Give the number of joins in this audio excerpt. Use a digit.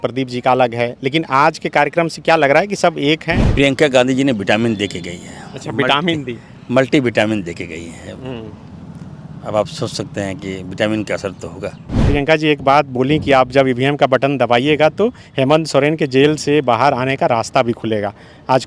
2